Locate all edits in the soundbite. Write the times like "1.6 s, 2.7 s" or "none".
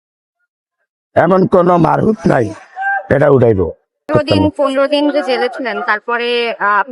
4.1 s